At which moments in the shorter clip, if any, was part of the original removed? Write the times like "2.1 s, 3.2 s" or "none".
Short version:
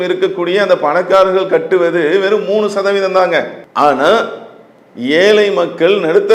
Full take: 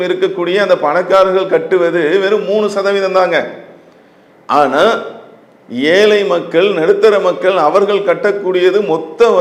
3.6 s